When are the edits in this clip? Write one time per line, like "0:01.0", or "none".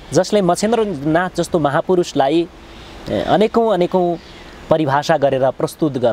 none